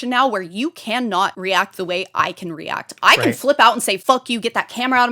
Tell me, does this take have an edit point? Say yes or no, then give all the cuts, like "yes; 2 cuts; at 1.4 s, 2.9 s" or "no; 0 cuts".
yes; 2 cuts; at 1.4 s, 4.0 s